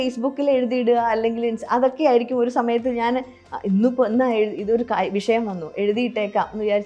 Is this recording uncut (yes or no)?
yes